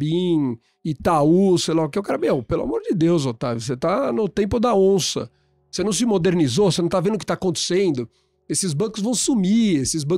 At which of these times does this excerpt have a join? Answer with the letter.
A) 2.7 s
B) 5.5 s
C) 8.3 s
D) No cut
D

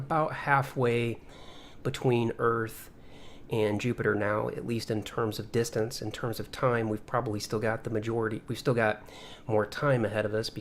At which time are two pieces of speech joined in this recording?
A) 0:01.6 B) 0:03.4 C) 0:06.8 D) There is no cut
C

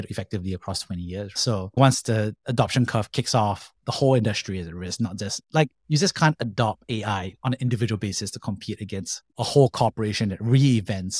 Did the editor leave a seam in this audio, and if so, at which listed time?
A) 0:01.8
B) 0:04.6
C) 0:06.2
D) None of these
A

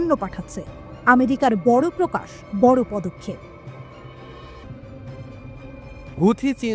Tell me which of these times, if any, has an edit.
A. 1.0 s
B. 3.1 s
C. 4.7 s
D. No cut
C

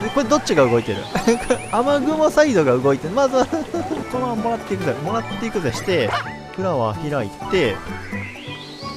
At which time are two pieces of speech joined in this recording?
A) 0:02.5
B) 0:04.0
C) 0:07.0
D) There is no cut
B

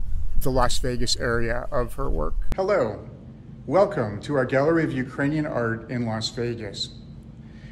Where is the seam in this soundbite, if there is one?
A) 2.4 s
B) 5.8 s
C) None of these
A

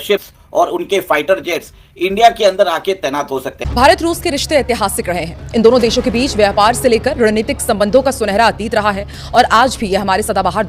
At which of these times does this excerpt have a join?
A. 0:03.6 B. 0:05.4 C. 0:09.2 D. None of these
A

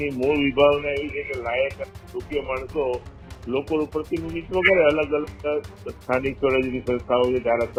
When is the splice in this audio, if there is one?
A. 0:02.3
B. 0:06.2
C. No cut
C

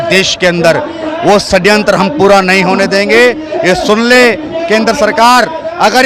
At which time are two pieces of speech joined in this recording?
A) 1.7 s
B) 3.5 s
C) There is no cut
C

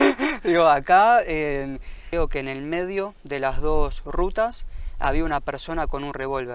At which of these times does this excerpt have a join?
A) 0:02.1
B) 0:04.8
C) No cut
A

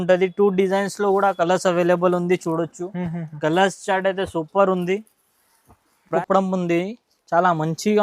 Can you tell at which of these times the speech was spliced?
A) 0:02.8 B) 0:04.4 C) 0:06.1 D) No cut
C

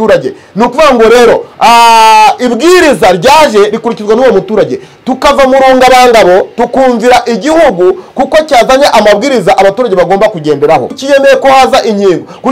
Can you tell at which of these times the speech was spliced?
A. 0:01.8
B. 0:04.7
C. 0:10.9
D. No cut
C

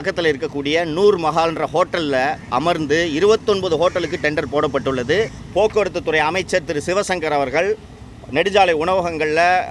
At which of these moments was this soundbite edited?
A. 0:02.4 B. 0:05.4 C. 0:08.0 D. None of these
B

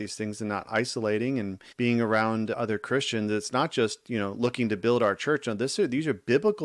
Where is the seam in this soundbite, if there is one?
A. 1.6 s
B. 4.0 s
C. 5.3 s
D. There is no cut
A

